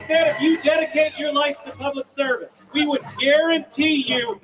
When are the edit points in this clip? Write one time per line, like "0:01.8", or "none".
0:02.7